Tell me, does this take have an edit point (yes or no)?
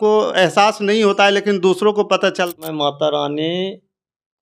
yes